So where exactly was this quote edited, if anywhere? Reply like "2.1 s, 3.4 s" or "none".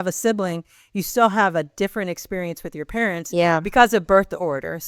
none